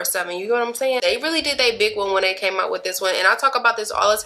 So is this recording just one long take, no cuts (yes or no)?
no